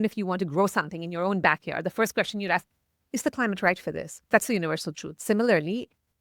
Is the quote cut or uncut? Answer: cut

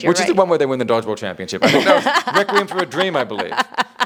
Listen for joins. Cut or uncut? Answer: uncut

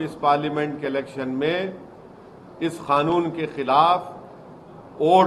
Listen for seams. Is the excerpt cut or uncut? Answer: uncut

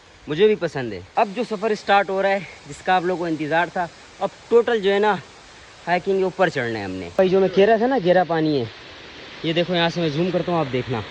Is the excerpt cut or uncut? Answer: cut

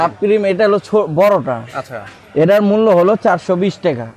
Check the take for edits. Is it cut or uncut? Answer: uncut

